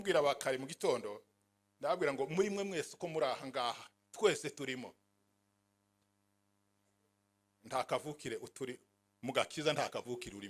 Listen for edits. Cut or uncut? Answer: uncut